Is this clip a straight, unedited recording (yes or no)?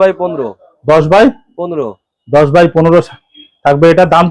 yes